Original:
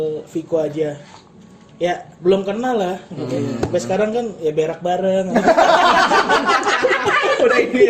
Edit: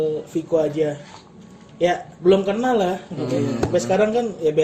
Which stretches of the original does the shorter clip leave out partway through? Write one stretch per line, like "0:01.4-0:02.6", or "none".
none